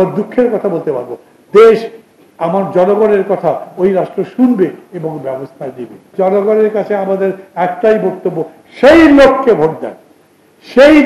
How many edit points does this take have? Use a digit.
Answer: 1